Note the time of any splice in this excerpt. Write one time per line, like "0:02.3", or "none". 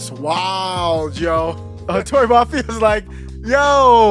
0:01.7